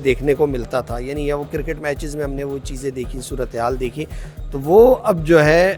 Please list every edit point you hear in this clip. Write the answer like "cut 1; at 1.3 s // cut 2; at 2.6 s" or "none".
none